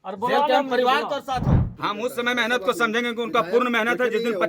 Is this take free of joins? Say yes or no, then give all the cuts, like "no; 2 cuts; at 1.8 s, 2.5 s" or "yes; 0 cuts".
no; 1 cut; at 1.7 s